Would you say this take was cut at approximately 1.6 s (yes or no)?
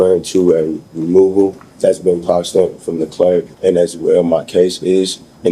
yes